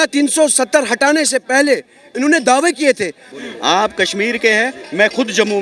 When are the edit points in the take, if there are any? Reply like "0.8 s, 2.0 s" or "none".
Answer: 3.3 s